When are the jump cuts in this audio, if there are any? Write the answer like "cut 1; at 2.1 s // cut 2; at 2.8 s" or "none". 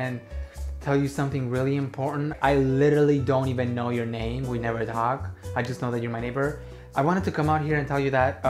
cut 1; at 2.3 s